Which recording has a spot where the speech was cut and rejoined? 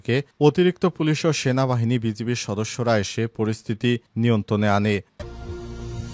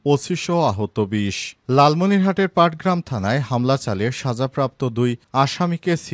first; 1 cut; at 5.1 s

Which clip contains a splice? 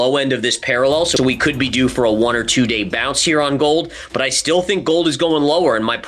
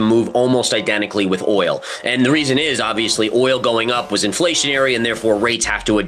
first; 1 cut; at 1.1 s

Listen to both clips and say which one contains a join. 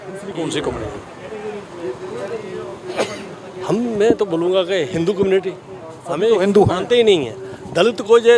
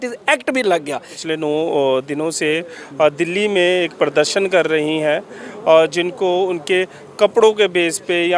second; 1 cut; at 1.1 s

